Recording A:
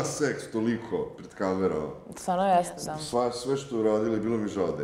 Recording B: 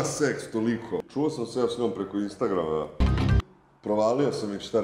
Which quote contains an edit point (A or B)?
B